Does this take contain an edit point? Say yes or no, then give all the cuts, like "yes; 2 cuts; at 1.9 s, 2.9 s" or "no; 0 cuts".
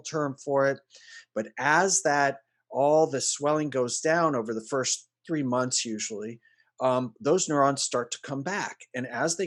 no; 0 cuts